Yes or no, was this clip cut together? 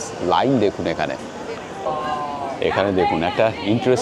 yes